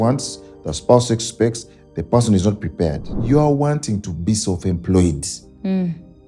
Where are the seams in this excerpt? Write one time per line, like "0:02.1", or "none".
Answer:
0:03.1